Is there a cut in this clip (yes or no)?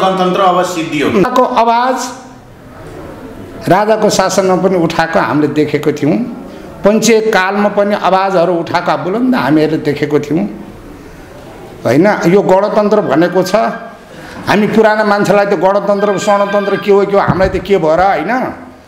yes